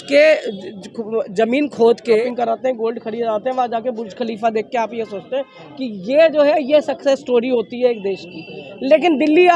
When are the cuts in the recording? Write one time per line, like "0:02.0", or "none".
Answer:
0:02.2